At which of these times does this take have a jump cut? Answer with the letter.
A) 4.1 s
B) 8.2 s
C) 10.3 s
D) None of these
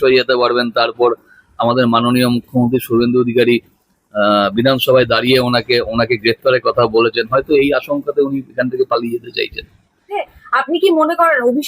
C